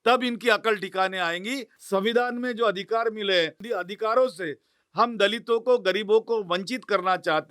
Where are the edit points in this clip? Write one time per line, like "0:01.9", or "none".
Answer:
0:01.7
0:03.6

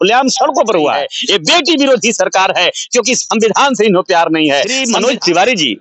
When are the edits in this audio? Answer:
0:01.1
0:04.8

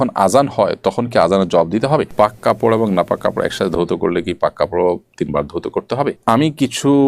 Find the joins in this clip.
0:02.1
0:06.2

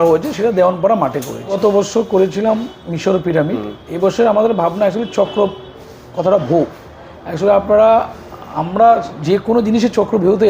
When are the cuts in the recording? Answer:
0:01.6

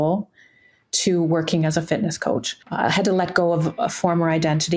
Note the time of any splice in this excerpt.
0:02.6

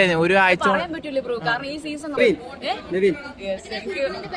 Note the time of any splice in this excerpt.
0:02.2

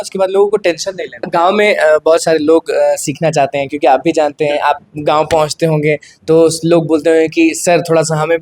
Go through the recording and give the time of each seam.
0:01.2

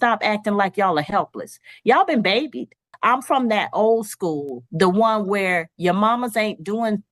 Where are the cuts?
0:02.9

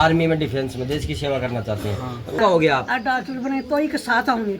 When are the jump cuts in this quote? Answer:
0:02.4

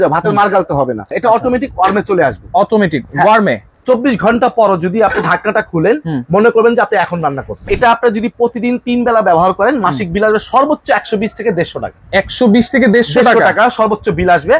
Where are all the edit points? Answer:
0:01.1
0:03.7
0:07.7

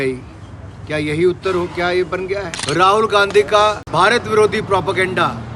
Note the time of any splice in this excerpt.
0:02.5
0:03.8

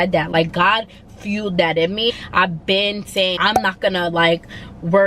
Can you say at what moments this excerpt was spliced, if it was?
0:02.1
0:03.4

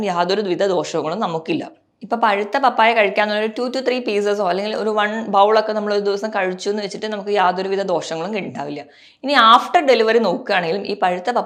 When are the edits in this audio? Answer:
none

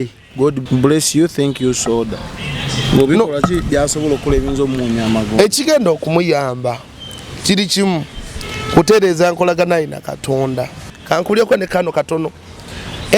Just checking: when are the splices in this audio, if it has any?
0:11.0

